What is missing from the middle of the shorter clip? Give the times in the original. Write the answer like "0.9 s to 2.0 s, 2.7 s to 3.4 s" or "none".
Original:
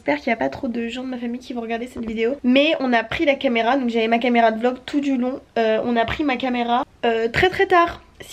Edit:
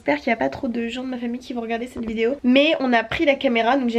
none